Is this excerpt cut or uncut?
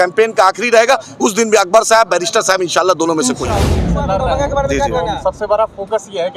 cut